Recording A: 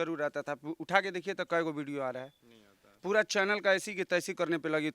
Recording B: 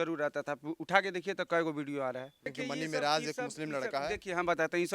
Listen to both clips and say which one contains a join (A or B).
B